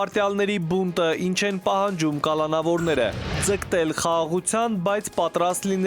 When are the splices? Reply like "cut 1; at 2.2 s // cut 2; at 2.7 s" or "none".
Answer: cut 1; at 3.3 s